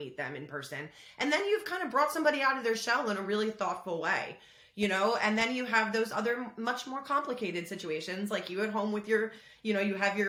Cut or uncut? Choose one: uncut